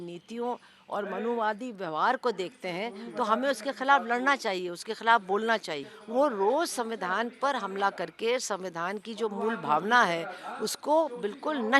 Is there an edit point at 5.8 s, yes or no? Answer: yes